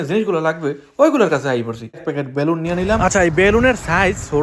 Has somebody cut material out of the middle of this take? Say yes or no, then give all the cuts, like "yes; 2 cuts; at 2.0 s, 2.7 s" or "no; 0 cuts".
yes; 1 cut; at 2.0 s